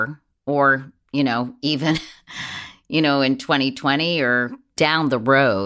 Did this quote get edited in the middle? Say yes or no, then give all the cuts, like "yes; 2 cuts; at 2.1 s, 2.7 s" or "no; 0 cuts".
yes; 1 cut; at 4.6 s